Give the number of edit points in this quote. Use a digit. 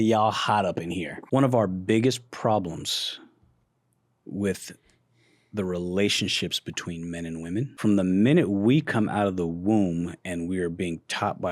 2